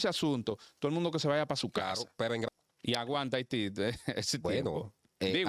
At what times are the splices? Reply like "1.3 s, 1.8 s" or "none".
2.5 s